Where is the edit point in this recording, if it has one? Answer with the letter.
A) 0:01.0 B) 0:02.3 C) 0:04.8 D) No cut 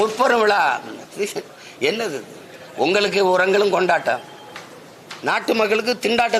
A